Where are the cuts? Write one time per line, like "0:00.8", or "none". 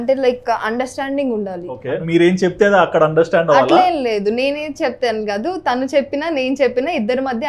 0:01.7